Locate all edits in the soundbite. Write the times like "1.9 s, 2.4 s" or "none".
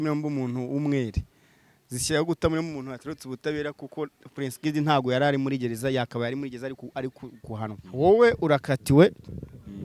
7.8 s